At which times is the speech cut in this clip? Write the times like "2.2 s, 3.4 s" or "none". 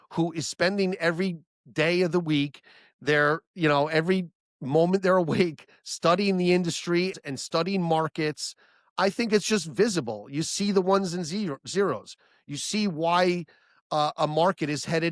7.2 s